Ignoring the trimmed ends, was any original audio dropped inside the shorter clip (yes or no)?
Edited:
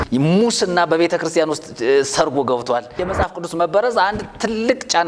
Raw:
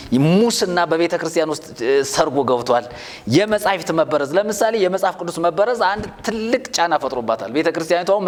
yes